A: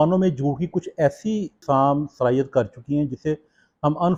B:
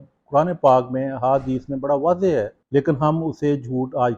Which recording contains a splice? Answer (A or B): B